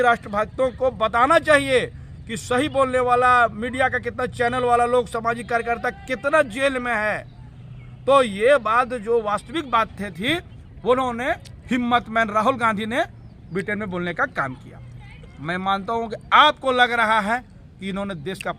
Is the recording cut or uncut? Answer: uncut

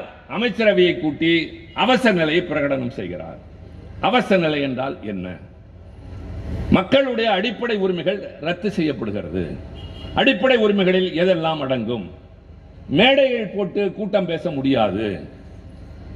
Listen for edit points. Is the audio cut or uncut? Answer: uncut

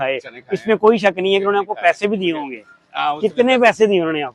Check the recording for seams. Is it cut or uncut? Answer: uncut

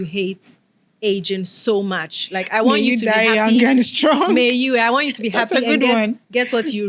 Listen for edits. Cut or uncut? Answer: uncut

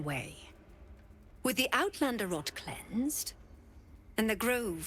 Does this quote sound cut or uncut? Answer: uncut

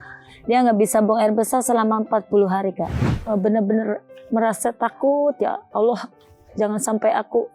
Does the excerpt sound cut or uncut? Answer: cut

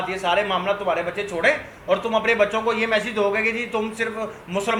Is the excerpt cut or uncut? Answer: uncut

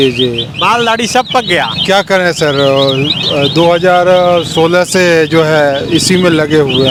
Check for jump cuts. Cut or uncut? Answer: uncut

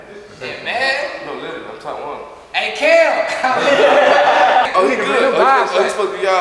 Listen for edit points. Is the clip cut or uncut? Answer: cut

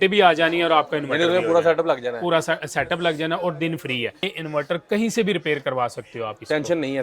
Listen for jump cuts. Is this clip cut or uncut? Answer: cut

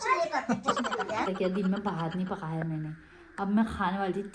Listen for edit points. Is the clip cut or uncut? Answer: cut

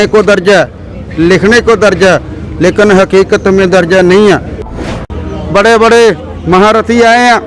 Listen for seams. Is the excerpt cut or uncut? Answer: cut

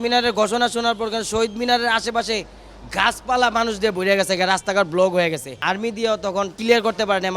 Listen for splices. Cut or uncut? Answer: cut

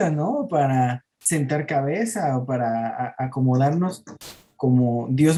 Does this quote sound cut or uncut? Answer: uncut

